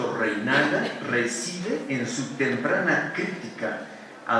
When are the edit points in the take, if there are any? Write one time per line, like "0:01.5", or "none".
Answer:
0:03.1